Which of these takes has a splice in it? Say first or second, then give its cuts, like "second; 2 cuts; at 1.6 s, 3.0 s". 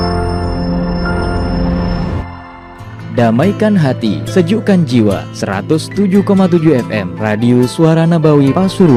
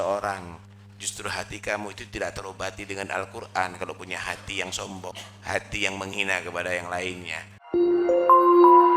second; 2 cuts; at 5.1 s, 7.7 s